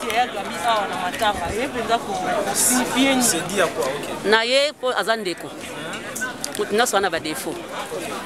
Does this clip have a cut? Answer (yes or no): no